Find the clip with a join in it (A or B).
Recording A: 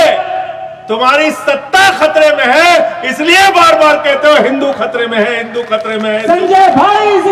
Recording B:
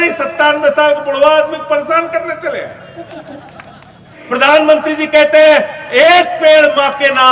B